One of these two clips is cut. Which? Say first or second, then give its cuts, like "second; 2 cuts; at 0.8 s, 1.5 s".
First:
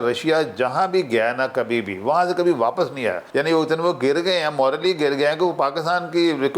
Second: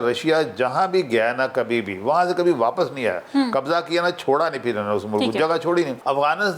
first; 1 cut; at 3.2 s